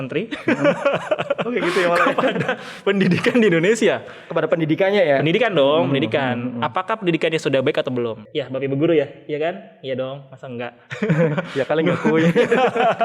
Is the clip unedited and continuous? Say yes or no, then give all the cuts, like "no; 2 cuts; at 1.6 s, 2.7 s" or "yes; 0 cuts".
no; 1 cut; at 8.2 s